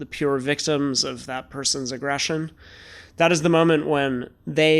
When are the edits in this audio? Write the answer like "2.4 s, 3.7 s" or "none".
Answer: none